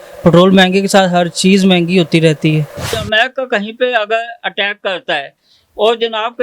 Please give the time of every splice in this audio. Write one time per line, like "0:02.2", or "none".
0:03.0